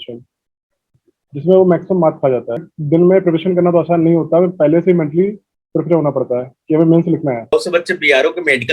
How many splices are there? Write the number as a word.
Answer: two